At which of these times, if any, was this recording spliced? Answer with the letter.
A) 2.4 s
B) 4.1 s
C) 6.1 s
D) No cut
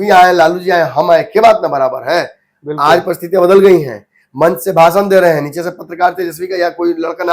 D